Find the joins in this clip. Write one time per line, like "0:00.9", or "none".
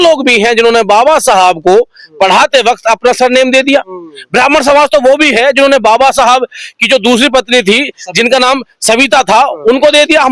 none